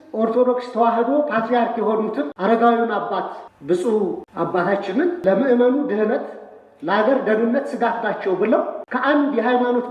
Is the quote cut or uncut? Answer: cut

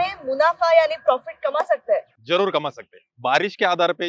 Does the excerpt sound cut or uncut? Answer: uncut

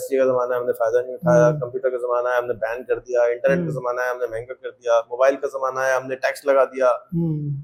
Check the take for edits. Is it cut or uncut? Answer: uncut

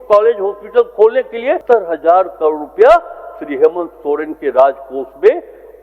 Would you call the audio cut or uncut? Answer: cut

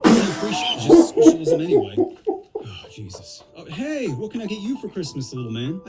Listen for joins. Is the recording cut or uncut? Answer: uncut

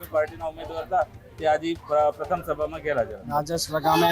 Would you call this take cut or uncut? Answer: cut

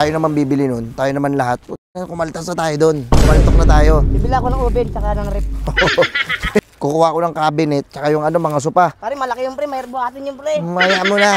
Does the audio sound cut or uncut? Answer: cut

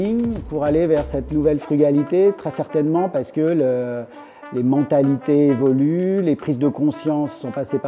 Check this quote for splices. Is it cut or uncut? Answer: uncut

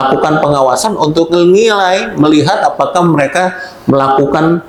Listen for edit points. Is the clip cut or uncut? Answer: uncut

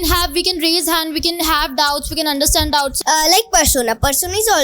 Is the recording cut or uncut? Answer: cut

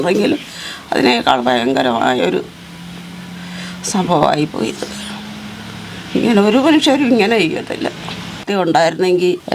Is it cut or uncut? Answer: cut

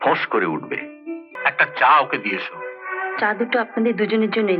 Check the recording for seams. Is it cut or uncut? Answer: cut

